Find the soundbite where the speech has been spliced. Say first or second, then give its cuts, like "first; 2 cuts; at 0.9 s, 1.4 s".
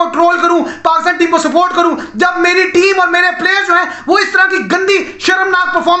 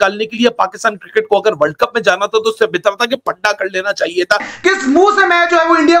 second; 1 cut; at 4.5 s